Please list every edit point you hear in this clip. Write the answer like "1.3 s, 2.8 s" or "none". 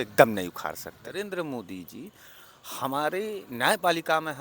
1.1 s

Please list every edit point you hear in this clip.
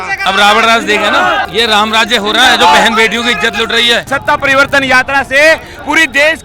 1.5 s, 4.1 s

